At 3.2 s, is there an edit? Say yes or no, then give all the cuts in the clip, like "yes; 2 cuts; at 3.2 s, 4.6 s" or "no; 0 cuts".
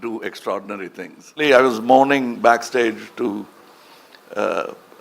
no; 1 cut; at 1.4 s